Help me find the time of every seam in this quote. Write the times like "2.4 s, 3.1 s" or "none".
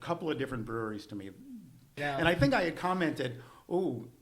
2.0 s